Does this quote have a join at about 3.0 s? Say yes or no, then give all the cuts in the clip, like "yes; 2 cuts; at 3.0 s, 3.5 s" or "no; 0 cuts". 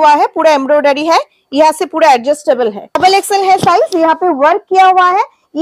yes; 1 cut; at 3.0 s